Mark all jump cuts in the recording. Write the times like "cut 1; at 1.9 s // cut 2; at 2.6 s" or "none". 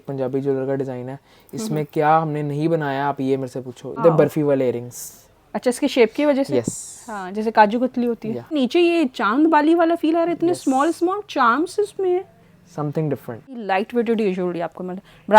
cut 1; at 4.0 s // cut 2; at 8.5 s // cut 3; at 13.6 s